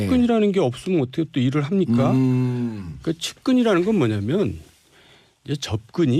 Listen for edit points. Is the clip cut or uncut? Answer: uncut